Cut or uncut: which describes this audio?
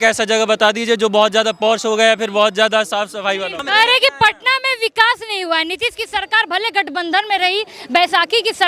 cut